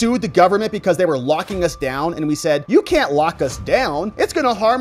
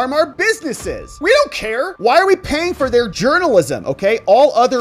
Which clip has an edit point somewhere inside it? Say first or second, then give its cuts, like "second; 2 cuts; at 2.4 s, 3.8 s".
second; 2 cuts; at 1.1 s, 3.1 s